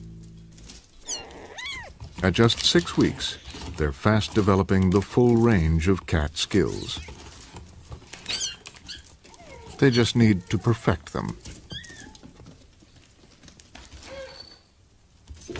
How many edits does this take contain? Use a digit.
1